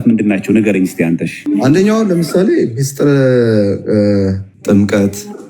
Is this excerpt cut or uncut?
cut